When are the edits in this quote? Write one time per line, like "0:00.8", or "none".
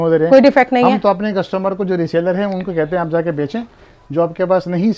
none